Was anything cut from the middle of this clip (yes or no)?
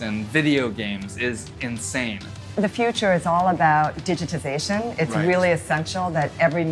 yes